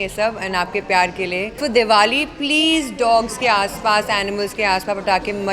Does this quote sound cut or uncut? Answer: cut